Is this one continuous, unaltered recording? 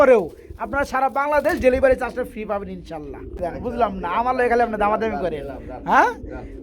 no; 1 cut; at 3.4 s

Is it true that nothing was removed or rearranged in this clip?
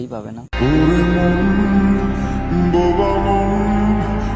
yes; 0 cuts

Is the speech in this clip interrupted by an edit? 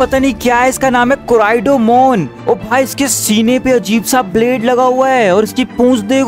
no; 0 cuts

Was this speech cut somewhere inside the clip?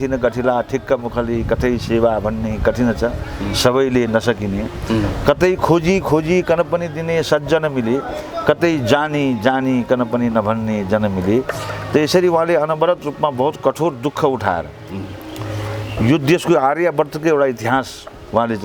no; 0 cuts

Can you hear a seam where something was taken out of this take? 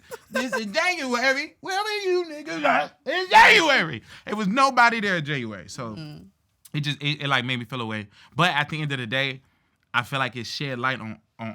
no; 0 cuts

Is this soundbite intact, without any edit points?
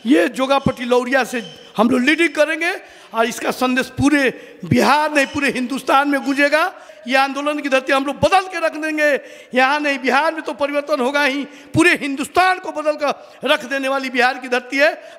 no; 1 cut; at 6.9 s

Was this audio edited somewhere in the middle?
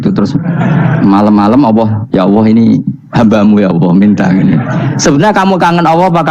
yes; 1 cut; at 2.0 s

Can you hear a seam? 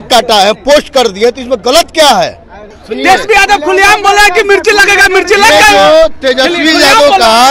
no; 0 cuts

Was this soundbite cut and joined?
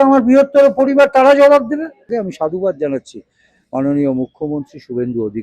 yes; 1 cut; at 2.1 s

